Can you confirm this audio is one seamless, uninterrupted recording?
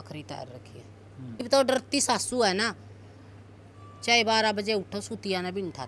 no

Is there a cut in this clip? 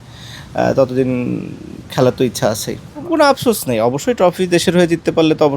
yes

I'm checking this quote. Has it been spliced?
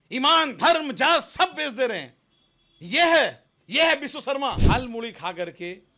yes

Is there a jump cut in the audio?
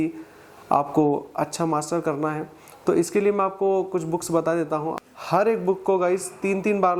yes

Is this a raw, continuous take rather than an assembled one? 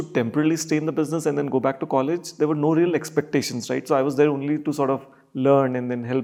yes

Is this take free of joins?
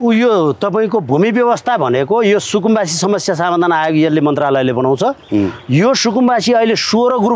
yes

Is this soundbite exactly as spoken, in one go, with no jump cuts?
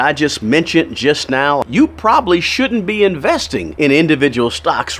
no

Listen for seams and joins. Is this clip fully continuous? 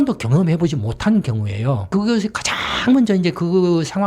no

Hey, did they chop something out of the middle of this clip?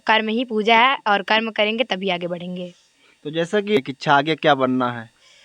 yes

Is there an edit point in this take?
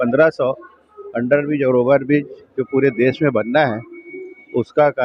no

